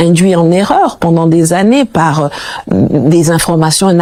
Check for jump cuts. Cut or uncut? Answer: uncut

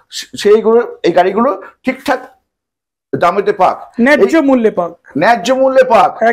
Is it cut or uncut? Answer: uncut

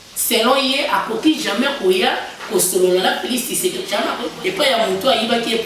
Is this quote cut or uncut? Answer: cut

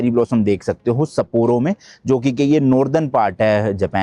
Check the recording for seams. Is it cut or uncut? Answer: uncut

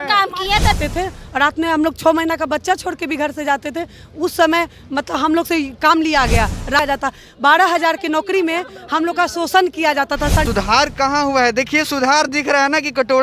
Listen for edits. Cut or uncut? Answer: cut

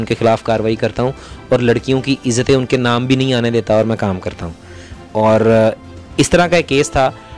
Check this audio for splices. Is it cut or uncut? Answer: uncut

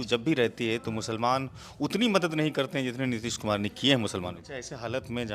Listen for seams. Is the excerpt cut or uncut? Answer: cut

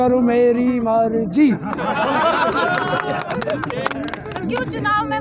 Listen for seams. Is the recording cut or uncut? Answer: uncut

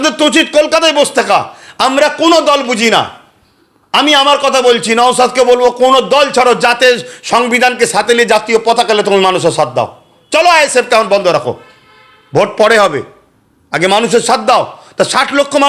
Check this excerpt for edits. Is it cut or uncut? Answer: uncut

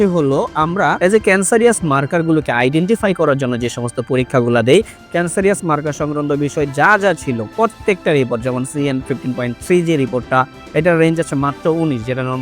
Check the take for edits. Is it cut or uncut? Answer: cut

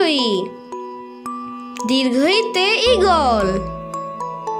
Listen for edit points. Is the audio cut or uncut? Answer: uncut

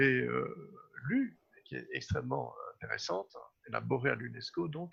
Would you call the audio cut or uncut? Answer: uncut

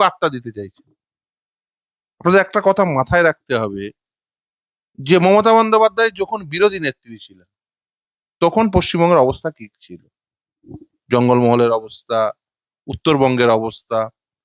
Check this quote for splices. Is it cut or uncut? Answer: uncut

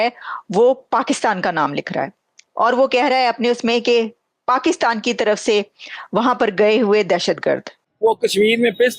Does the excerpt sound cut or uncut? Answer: cut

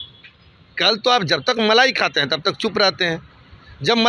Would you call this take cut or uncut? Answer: uncut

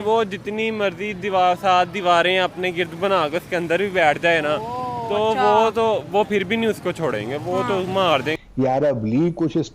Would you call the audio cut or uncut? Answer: cut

